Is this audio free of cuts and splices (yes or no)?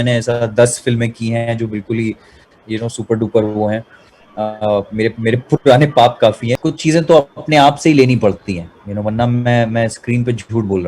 no